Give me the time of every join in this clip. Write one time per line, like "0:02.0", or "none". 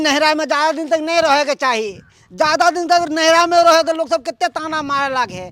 none

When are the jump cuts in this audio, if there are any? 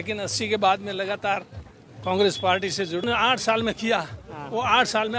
0:03.0

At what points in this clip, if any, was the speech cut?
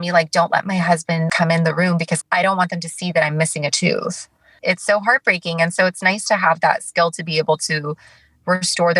0:01.3
0:02.2
0:04.6

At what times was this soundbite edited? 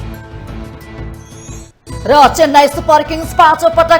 0:01.6

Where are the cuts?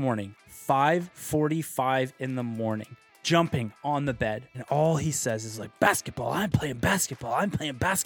0:03.1
0:04.5

